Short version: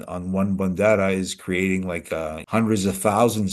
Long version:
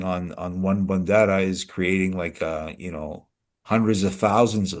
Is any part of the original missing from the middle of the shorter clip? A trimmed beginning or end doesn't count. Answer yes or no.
yes